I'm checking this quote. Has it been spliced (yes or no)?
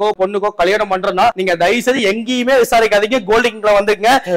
yes